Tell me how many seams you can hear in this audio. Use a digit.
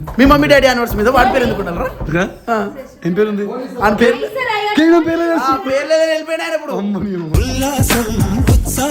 0